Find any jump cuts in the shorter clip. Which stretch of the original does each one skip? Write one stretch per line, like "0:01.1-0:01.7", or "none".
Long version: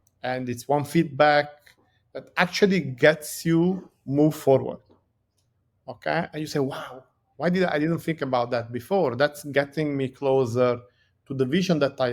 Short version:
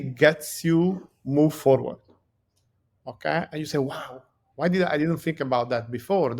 none